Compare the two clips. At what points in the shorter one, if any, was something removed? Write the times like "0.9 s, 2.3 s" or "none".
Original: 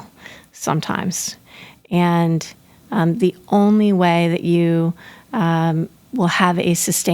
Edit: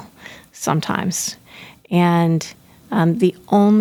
none